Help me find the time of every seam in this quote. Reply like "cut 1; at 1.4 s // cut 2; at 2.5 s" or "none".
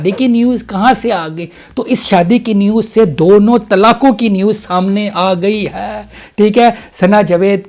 none